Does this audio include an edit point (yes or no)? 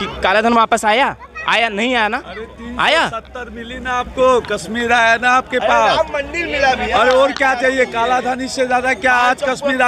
no